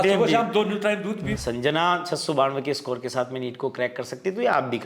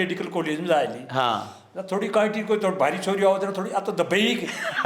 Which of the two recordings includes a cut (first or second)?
first